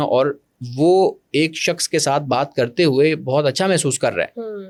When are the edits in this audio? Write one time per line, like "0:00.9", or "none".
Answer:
none